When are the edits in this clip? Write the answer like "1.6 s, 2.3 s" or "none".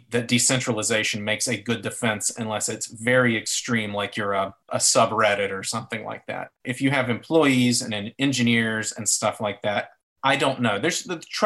4.7 s, 6.6 s